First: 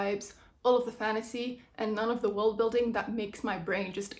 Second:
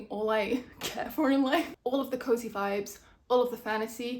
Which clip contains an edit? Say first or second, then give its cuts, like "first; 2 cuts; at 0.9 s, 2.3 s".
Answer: second; 1 cut; at 1.7 s